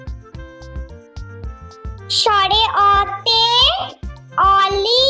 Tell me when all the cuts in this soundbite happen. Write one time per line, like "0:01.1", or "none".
none